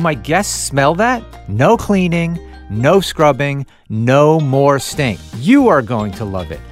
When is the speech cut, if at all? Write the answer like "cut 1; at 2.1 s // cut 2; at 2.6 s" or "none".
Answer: cut 1; at 1.4 s // cut 2; at 5.2 s